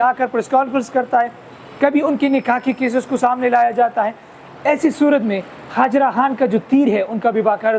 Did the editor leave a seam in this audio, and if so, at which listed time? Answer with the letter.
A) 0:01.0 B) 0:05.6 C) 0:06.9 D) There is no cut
D